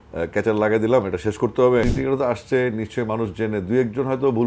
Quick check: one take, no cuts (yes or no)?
no